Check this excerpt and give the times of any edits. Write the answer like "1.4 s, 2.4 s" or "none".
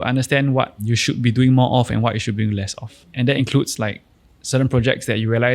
3.1 s